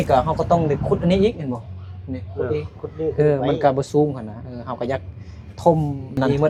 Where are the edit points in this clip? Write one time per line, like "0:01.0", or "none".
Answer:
none